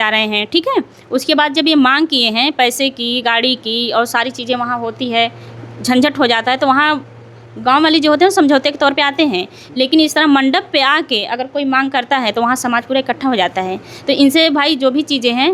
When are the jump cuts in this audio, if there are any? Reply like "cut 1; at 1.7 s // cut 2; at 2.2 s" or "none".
none

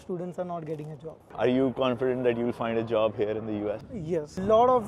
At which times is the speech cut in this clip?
cut 1; at 1.2 s // cut 2; at 3.9 s

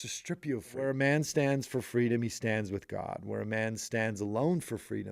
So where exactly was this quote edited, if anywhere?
cut 1; at 0.9 s

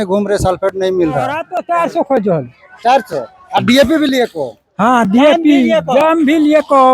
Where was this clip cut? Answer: cut 1; at 1.5 s

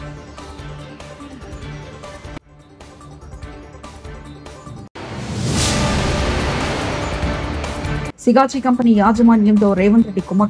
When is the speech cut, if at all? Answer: cut 1; at 8.0 s

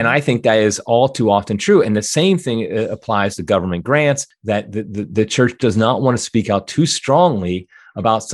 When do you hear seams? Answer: cut 1; at 4.3 s

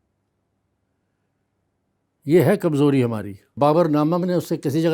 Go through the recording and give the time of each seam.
cut 1; at 3.6 s

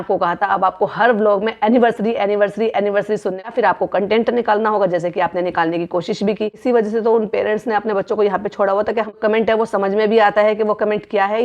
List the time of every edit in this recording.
cut 1; at 3.5 s // cut 2; at 6.6 s // cut 3; at 9.1 s

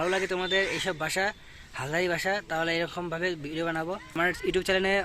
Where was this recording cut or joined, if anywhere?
cut 1; at 4.1 s

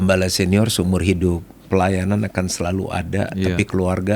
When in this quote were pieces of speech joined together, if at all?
cut 1; at 1.6 s

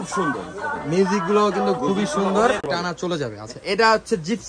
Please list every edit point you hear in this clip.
cut 1; at 2.6 s

